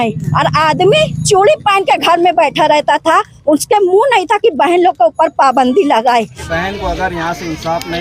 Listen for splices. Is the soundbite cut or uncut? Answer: cut